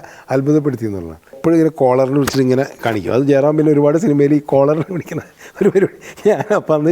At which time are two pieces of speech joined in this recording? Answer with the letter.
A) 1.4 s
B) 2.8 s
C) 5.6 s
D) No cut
A